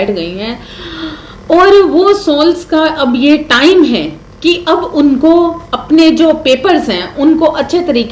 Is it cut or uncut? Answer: uncut